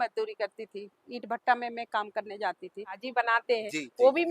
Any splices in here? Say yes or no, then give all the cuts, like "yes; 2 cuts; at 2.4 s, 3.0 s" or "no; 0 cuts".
yes; 1 cut; at 3.0 s